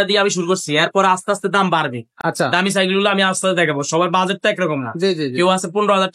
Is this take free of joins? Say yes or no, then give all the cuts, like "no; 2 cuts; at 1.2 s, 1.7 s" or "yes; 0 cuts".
yes; 0 cuts